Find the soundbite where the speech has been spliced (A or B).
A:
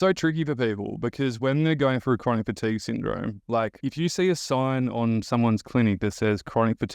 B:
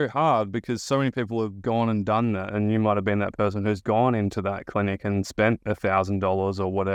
A